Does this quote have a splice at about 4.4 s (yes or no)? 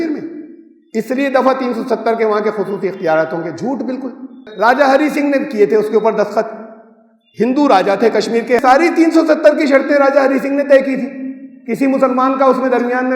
yes